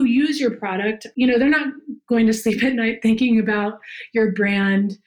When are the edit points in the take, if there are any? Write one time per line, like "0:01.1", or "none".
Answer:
0:01.0